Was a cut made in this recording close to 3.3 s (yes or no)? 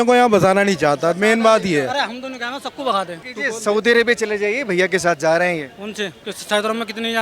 yes